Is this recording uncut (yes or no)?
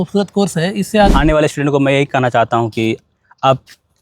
no